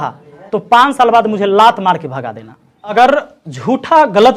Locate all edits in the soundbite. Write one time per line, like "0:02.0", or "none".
0:02.9